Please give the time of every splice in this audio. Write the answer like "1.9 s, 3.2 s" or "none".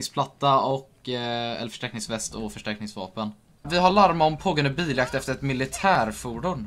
3.9 s